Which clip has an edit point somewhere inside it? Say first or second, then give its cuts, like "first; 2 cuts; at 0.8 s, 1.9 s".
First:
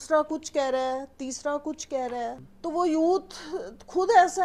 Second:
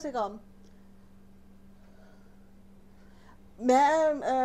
first; 1 cut; at 2.5 s